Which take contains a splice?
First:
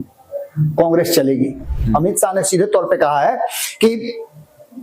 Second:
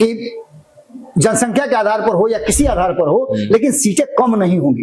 first; 1 cut; at 1.7 s

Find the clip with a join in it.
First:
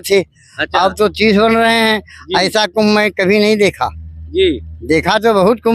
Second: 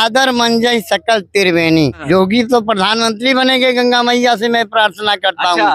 second; 1 cut; at 2.0 s

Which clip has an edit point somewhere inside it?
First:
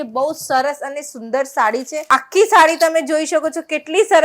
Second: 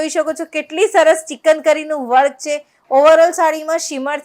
first; 1 cut; at 1.9 s

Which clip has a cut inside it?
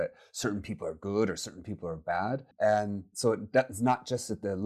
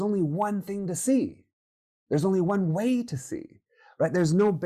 first; 1 cut; at 2.5 s

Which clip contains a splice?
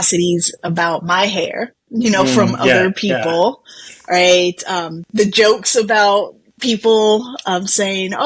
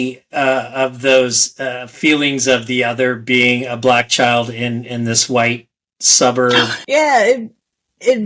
second; 1 cut; at 6.7 s

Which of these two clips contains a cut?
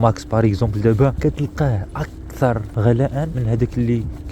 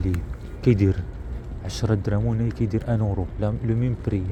first; 2 cuts; at 1.2 s, 3.1 s

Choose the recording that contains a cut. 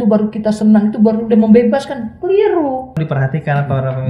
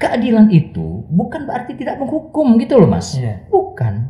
first; 1 cut; at 3.0 s

